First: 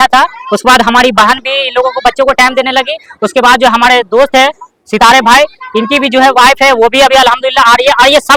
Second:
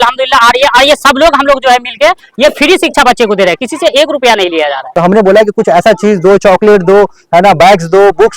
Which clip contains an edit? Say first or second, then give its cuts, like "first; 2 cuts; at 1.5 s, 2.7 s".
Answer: second; 1 cut; at 4.8 s